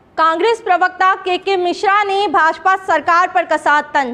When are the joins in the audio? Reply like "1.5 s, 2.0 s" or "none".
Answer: none